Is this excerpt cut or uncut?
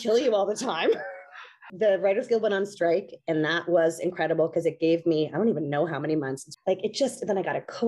cut